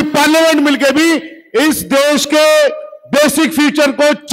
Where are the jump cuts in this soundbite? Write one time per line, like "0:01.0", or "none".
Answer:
none